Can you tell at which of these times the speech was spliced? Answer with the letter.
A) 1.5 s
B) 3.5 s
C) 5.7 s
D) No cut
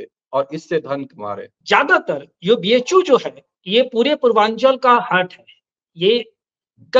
A